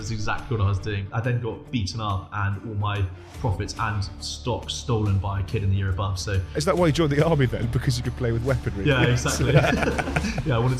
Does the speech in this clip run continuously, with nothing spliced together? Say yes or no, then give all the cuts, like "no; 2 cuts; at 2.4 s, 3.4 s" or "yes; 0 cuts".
no; 2 cuts; at 0.7 s, 6.7 s